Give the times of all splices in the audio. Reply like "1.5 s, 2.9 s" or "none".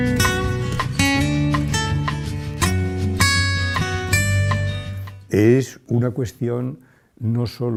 none

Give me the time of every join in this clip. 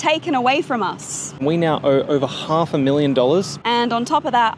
1.3 s, 3.6 s

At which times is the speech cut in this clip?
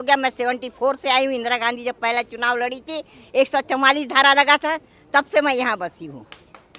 none

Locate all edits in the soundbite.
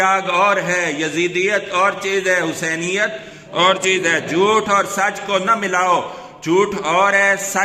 none

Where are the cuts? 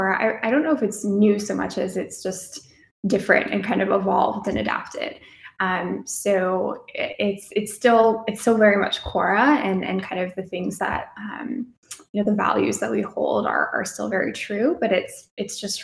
none

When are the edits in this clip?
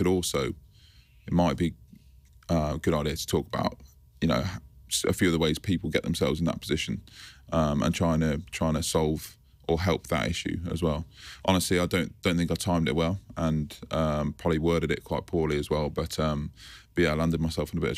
none

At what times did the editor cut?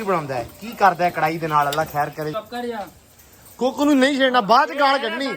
2.3 s

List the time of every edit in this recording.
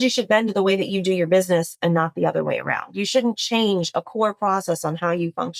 none

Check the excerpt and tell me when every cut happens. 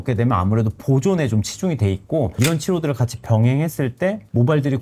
2.3 s

